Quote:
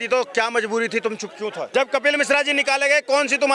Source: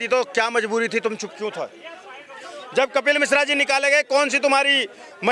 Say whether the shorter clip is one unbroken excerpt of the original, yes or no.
no